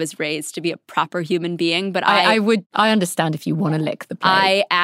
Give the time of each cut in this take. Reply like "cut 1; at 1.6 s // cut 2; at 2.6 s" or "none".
cut 1; at 2.7 s

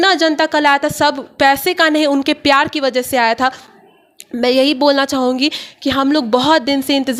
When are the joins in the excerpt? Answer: none

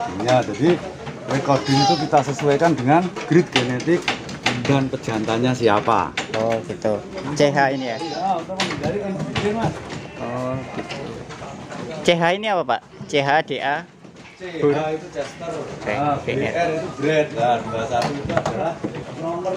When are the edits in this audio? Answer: cut 1; at 15.8 s

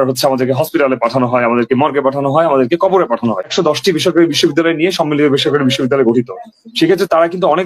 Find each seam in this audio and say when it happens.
cut 1; at 3.5 s

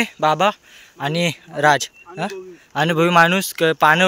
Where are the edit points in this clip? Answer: none

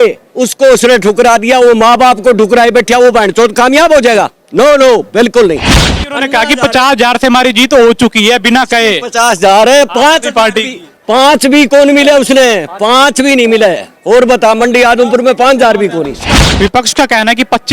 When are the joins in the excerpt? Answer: cut 1; at 16.5 s

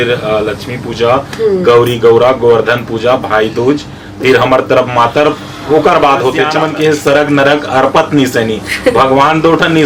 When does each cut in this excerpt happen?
cut 1; at 6.5 s

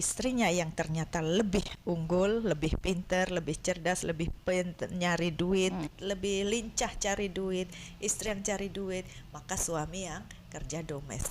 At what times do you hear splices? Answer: cut 1; at 5.9 s

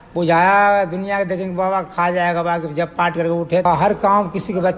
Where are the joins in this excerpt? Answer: cut 1; at 3.7 s

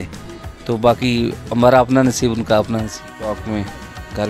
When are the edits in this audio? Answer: cut 1; at 3.0 s

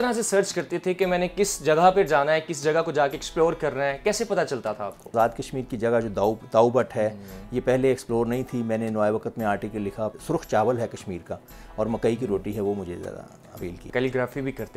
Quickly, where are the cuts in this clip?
cut 1; at 5.1 s // cut 2; at 10.1 s // cut 3; at 13.8 s

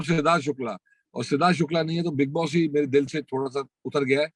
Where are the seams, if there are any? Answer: none

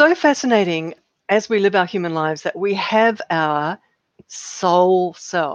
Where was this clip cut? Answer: cut 1; at 1.0 s

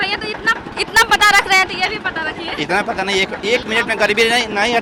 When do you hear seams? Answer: none

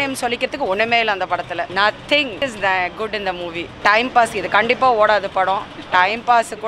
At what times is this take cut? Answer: cut 1; at 2.4 s

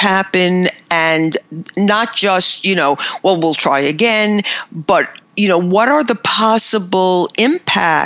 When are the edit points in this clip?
cut 1; at 5.2 s

